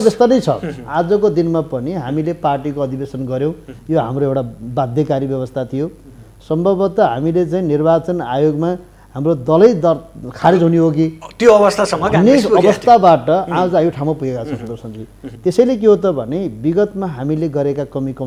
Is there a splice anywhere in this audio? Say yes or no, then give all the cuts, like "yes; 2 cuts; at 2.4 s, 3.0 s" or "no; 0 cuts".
no; 0 cuts